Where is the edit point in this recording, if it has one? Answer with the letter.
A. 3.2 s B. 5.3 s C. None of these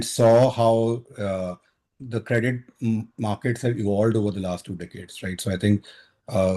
C